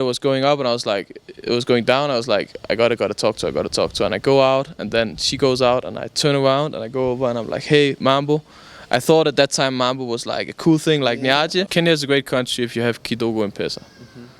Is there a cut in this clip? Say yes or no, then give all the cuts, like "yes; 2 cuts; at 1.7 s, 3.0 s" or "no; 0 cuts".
yes; 1 cut; at 11.7 s